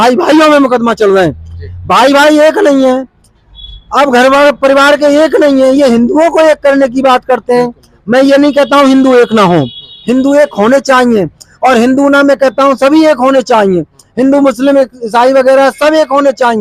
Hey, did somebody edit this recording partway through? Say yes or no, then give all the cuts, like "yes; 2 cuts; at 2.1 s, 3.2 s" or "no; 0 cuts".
no; 0 cuts